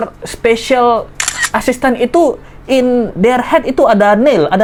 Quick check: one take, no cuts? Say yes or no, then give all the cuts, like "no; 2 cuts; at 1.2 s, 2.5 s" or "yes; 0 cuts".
yes; 0 cuts